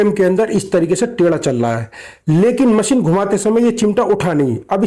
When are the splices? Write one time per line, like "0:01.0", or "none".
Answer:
none